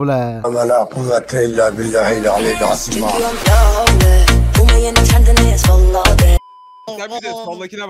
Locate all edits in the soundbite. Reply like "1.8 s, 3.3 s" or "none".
none